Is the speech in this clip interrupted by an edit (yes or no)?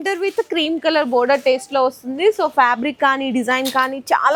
no